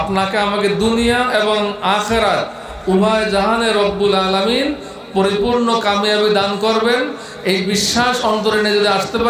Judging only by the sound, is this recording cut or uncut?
uncut